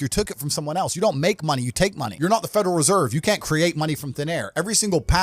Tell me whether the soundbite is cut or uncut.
cut